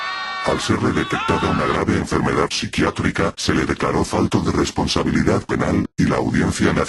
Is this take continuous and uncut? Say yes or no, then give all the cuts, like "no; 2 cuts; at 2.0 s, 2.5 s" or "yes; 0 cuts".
yes; 0 cuts